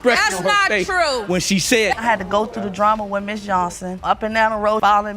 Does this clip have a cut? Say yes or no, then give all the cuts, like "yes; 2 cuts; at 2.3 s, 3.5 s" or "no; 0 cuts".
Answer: yes; 1 cut; at 2.0 s